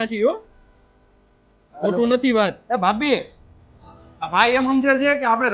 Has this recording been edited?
no; 0 cuts

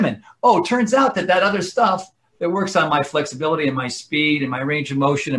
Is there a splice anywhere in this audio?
no; 0 cuts

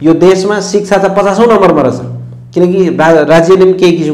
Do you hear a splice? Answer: no; 0 cuts

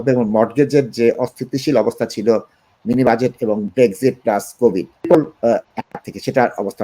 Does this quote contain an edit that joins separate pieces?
yes; 2 cuts; at 3.7 s, 5.0 s

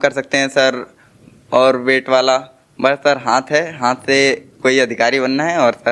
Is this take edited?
no; 0 cuts

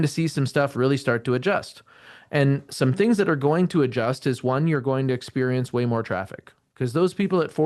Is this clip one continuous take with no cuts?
yes; 0 cuts

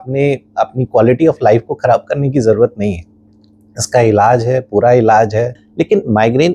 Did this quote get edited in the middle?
yes; 1 cut; at 5.6 s

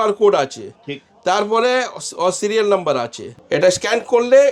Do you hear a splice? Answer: yes; 1 cut; at 3.2 s

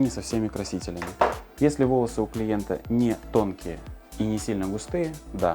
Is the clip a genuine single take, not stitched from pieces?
yes; 0 cuts

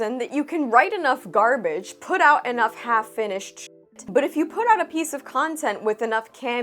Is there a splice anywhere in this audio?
yes; 1 cut; at 4.0 s

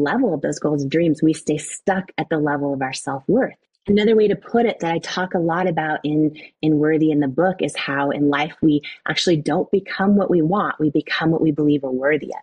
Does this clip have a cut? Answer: yes; 1 cut; at 3.7 s

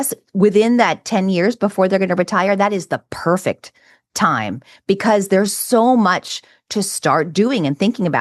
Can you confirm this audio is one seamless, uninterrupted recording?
yes; 0 cuts

